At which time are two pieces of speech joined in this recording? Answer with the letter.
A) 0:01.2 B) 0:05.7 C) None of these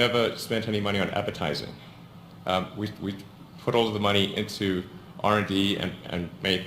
A